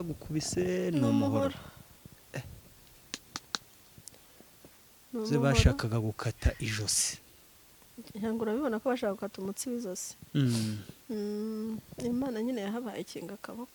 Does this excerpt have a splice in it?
no; 0 cuts

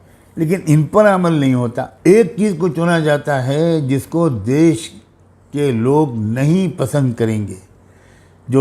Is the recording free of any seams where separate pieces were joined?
no; 1 cut; at 1.9 s

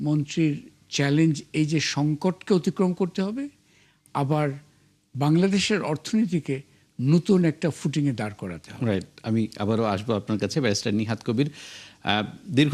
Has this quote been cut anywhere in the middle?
no; 0 cuts

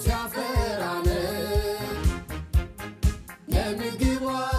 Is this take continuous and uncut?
yes; 0 cuts

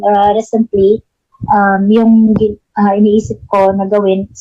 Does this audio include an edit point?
no; 0 cuts

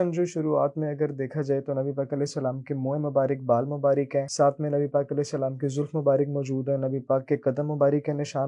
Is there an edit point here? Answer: yes; 1 cut; at 4.3 s

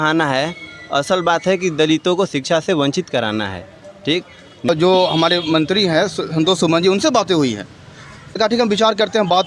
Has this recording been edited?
yes; 2 cuts; at 4.7 s, 8.4 s

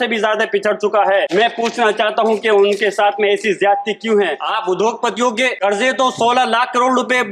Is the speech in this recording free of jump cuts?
no; 3 cuts; at 1.3 s, 4.5 s, 5.6 s

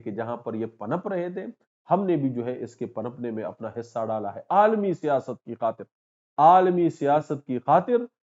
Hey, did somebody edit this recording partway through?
no; 0 cuts

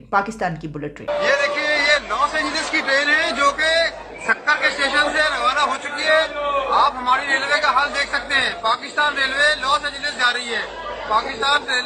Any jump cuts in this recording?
yes; 1 cut; at 1.1 s

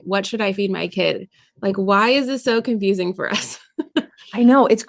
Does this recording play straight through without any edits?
yes; 0 cuts

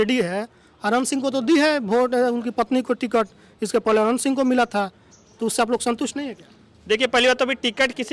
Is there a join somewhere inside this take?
no; 0 cuts

